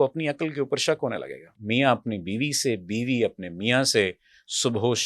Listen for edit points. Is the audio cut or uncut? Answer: cut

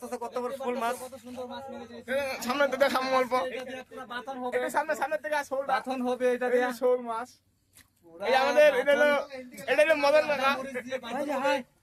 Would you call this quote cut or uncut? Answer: uncut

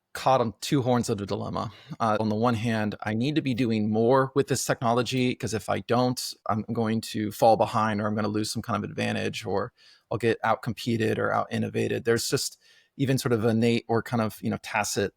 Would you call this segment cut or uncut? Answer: cut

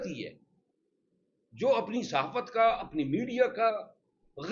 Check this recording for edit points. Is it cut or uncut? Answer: uncut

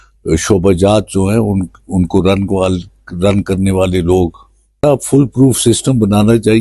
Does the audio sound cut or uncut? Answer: cut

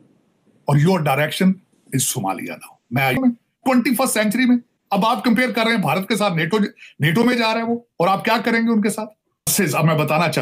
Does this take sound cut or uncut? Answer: cut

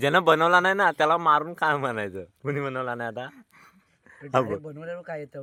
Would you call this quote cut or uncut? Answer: uncut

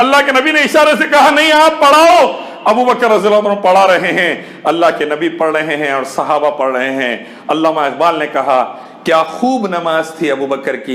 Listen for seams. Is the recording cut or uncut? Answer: uncut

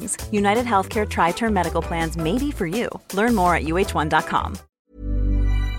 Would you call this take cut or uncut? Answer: cut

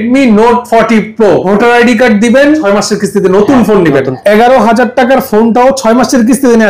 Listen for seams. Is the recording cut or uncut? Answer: cut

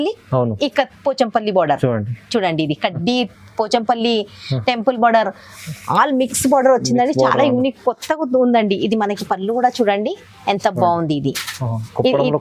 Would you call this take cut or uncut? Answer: uncut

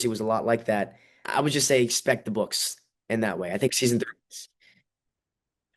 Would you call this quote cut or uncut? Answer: cut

